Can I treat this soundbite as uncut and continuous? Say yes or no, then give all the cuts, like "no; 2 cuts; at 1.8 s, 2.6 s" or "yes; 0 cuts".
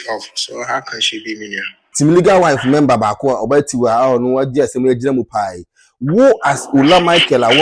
no; 1 cut; at 1.8 s